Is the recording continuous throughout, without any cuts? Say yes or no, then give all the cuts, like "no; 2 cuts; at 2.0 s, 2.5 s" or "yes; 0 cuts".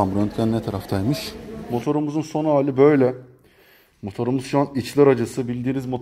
no; 1 cut; at 1.6 s